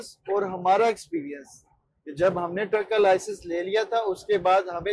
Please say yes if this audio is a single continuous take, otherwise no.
yes